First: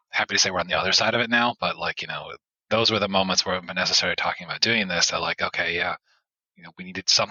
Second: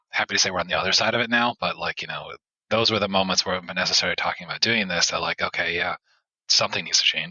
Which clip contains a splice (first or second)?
second